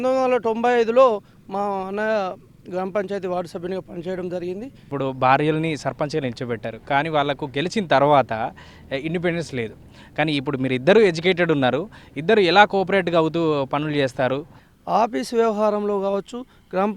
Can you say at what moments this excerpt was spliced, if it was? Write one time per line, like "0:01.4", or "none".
0:04.9
0:14.6